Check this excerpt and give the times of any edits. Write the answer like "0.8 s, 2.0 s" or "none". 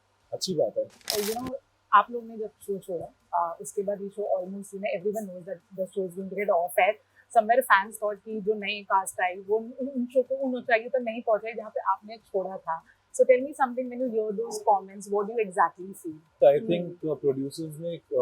1.0 s, 16.4 s